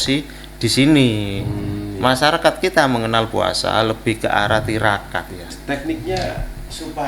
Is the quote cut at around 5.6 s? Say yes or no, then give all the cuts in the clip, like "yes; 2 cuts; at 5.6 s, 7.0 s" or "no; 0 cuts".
yes; 1 cut; at 5.6 s